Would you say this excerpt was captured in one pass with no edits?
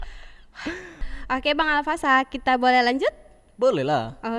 no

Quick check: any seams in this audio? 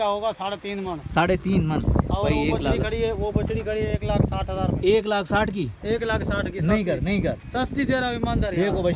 no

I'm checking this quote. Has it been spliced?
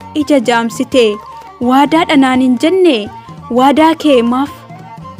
no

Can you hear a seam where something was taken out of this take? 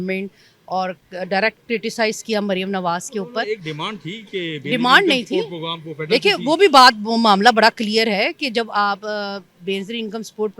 no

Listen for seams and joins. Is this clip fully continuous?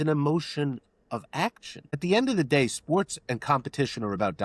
no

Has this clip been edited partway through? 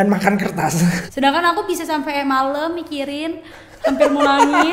yes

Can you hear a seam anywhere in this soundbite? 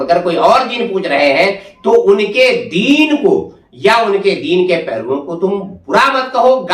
no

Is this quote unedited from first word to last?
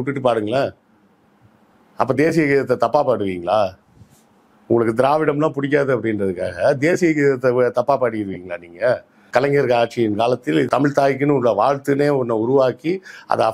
no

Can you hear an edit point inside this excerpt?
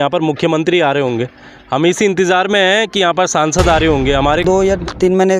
yes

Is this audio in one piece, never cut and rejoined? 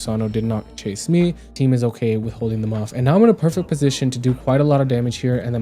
no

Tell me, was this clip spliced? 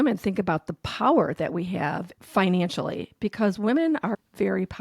yes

